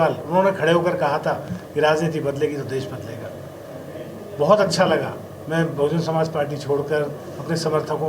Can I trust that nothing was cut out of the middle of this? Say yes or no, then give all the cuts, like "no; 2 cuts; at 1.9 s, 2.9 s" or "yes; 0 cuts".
yes; 0 cuts